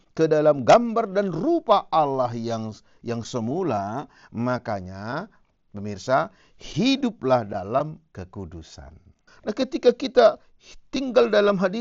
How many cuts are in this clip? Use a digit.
1